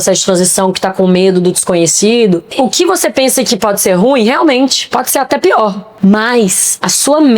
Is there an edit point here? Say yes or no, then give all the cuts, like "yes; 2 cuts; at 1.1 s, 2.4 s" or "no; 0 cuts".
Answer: yes; 2 cuts; at 2.5 s, 5.9 s